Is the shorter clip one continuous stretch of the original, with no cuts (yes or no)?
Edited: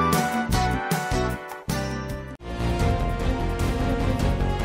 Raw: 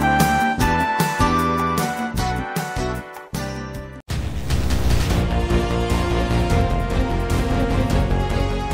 no